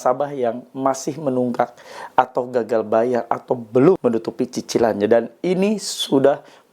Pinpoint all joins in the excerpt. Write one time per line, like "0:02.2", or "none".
0:04.0